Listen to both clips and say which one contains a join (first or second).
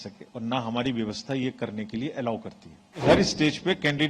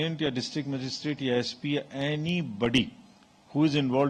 first